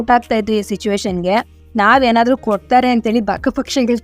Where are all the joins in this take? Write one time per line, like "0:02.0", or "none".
0:01.6